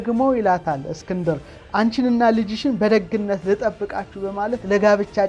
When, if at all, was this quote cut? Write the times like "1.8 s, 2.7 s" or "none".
none